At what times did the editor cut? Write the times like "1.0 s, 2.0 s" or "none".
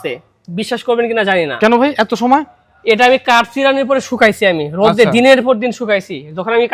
none